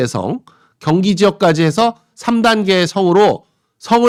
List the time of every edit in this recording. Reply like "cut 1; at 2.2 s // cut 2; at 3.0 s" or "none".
none